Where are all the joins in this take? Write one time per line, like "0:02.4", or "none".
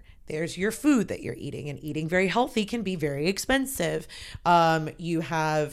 none